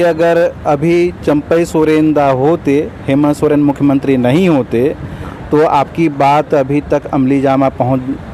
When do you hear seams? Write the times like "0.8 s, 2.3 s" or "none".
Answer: none